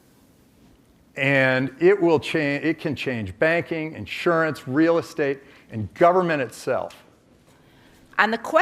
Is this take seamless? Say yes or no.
yes